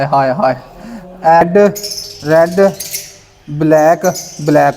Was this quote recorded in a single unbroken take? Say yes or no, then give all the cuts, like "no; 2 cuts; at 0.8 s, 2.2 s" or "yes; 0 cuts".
no; 1 cut; at 1.4 s